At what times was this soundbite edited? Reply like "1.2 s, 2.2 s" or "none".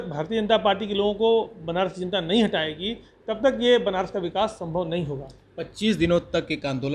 none